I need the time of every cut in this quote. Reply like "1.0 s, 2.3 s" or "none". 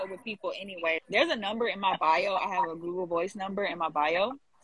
1.0 s